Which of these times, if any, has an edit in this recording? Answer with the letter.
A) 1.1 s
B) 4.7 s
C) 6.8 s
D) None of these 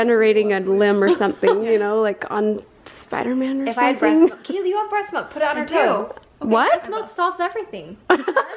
D